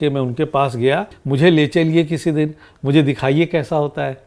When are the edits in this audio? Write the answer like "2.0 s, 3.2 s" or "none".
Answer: 1.2 s